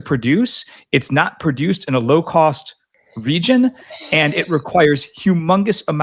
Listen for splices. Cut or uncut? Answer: uncut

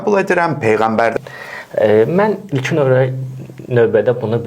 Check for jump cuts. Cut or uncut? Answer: cut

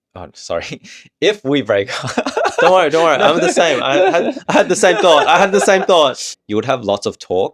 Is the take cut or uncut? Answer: cut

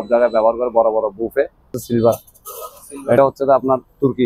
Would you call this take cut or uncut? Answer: cut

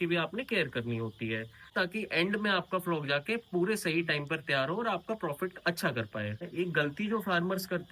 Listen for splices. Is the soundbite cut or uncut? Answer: cut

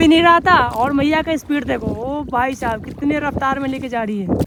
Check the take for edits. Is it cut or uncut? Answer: uncut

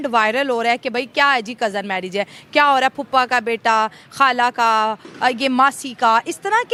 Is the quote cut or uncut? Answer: uncut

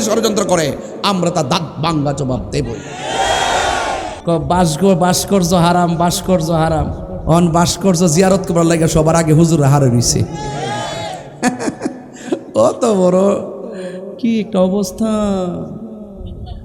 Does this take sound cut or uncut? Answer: cut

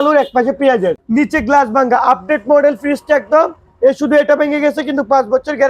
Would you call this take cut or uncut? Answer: cut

